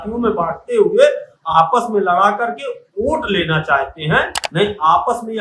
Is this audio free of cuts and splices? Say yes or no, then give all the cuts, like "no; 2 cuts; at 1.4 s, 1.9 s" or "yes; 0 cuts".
no; 1 cut; at 4.4 s